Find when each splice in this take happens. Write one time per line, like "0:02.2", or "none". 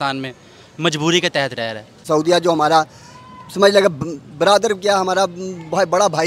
0:02.0